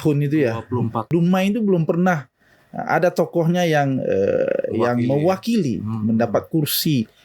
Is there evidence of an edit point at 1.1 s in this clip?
yes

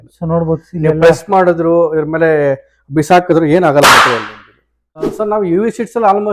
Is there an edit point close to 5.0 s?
yes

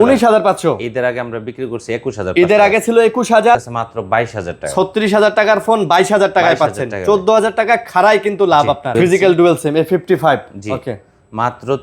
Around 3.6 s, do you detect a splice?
yes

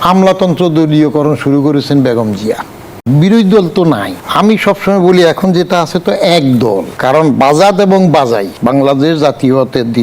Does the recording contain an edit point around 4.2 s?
yes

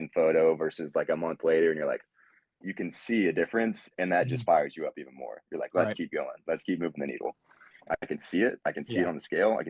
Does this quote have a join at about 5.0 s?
no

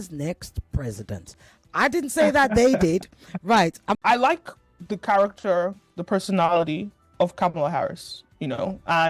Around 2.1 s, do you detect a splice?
no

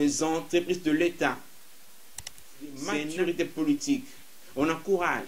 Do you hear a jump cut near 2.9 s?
yes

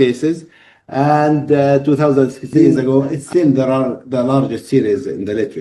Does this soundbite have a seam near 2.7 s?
yes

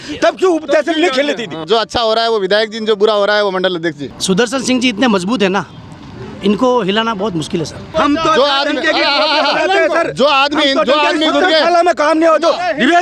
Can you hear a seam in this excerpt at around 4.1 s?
yes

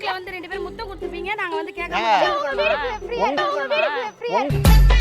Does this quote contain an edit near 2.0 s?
no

